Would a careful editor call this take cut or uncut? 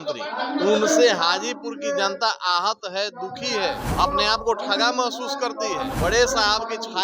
cut